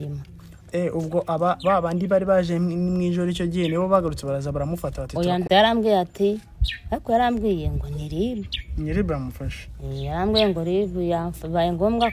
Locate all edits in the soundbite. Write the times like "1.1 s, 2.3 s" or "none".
5.4 s

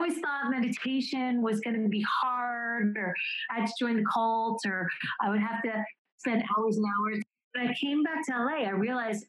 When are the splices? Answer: 6.1 s, 7.4 s

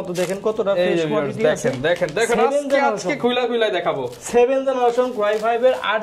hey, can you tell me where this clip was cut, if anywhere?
none

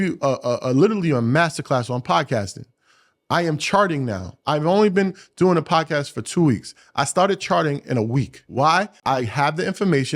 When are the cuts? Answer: 8.9 s

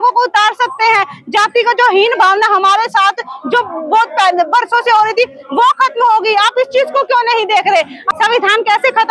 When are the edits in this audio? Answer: 8.0 s

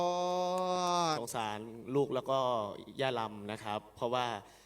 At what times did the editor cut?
1.2 s

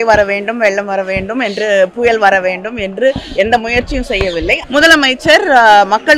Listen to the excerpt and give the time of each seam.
4.6 s

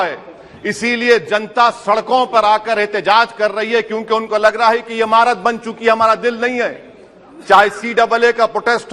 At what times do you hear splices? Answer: none

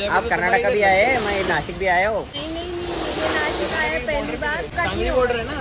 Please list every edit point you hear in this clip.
2.4 s, 4.7 s

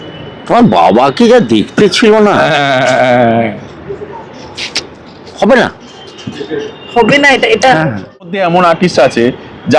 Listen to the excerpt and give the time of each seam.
8.3 s

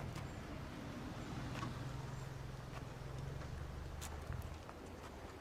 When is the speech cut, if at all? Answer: none

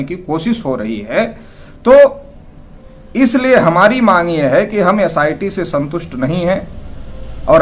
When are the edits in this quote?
none

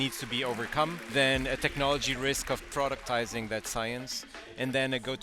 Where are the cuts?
1.0 s

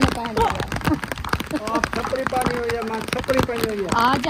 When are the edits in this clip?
none

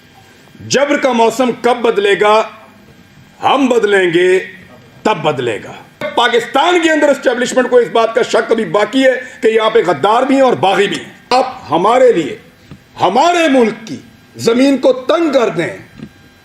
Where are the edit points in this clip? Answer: 6.0 s, 11.3 s

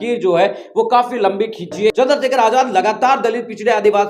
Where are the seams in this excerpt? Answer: 1.9 s

